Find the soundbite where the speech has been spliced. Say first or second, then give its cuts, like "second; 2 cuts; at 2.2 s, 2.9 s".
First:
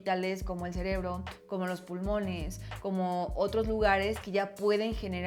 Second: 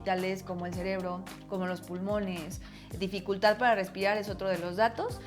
second; 1 cut; at 2.7 s